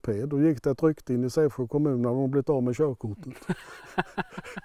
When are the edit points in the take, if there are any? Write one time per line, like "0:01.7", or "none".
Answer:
none